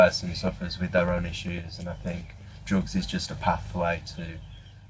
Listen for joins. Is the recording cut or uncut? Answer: uncut